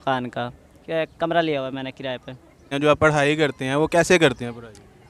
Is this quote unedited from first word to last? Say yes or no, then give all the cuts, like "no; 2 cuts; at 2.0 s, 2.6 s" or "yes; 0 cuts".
no; 1 cut; at 2.7 s